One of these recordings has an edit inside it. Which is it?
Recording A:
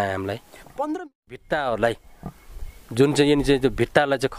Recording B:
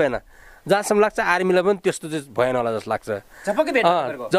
A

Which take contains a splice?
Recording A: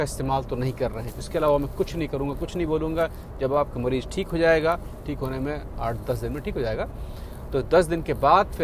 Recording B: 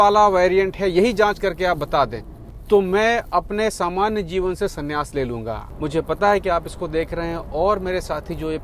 B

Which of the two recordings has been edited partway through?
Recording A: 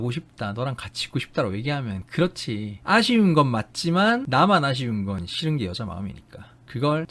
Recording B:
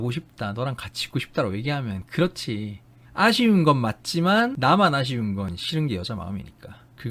A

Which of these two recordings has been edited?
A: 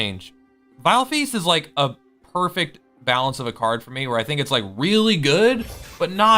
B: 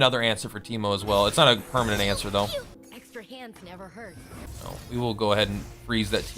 B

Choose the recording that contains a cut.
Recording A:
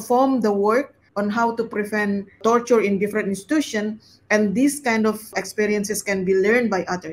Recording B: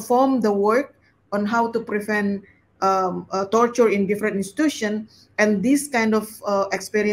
A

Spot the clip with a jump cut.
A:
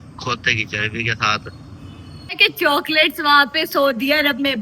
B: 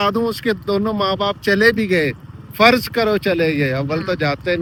A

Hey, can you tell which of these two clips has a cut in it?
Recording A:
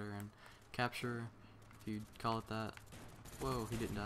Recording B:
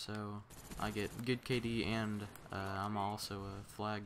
A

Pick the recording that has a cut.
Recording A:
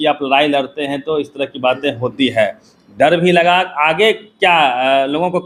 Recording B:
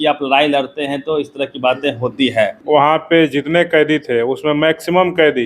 B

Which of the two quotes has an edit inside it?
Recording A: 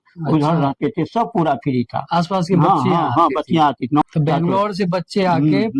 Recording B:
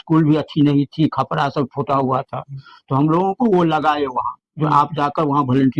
A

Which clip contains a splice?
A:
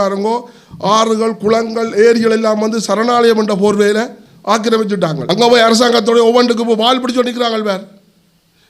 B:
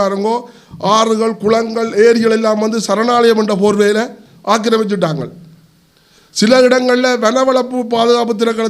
A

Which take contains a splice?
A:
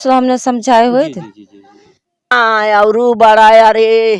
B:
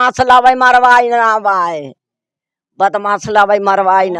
A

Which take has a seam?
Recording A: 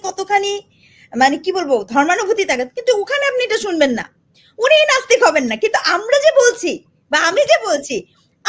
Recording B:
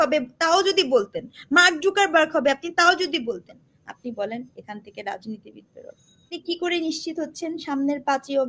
B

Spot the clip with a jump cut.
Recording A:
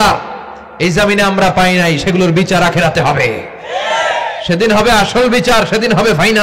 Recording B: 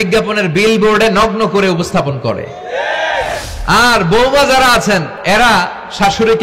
B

